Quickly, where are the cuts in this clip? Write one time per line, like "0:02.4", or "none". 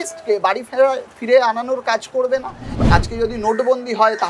0:02.8